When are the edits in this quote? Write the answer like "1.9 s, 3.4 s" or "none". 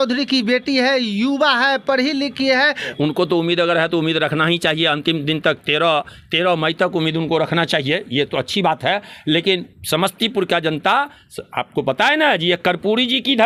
none